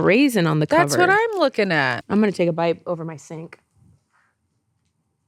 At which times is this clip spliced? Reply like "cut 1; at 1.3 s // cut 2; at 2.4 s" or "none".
cut 1; at 2.0 s

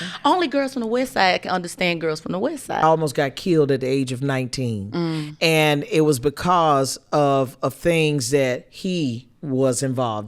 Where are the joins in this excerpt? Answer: cut 1; at 2.8 s

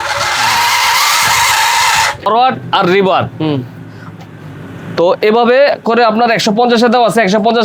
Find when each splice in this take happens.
cut 1; at 2.3 s

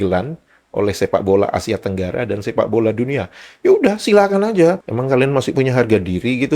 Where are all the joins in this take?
cut 1; at 4.8 s

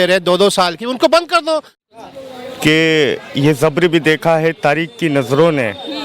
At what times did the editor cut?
cut 1; at 1.8 s

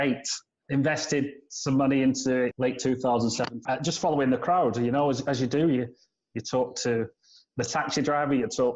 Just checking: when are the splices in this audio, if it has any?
none

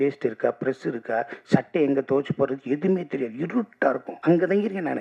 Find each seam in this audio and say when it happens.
cut 1; at 4.1 s

